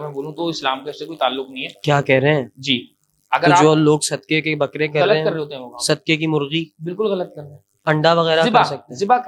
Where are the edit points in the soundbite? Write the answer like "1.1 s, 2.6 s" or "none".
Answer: none